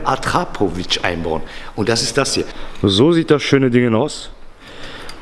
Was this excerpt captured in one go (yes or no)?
no